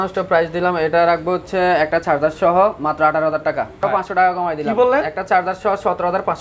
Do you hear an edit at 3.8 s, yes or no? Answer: yes